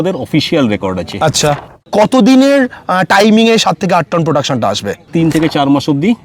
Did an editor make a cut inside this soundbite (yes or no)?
yes